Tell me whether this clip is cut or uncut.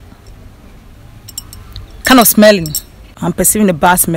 cut